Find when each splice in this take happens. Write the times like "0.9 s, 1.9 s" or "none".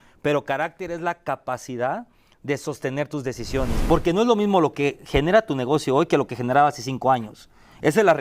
3.7 s